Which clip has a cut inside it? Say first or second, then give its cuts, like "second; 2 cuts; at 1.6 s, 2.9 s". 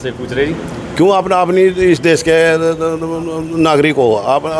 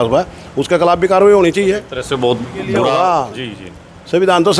second; 2 cuts; at 1.9 s, 2.9 s